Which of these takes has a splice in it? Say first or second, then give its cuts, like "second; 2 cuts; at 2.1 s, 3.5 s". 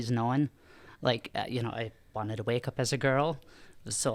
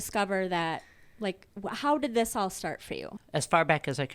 second; 1 cut; at 3.1 s